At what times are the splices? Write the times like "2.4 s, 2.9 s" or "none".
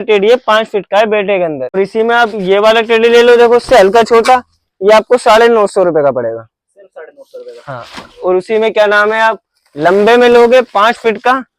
1.8 s